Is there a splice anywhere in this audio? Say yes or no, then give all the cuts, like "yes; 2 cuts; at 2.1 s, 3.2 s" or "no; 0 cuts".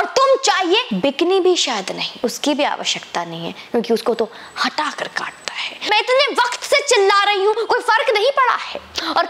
yes; 3 cuts; at 0.9 s, 2.1 s, 5.9 s